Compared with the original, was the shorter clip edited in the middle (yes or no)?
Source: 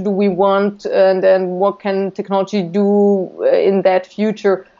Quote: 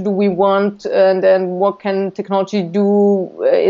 no